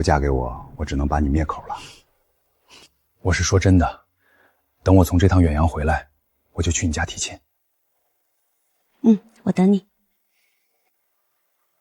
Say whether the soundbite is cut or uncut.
uncut